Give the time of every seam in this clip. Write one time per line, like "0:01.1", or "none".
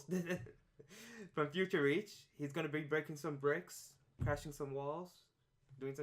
0:04.3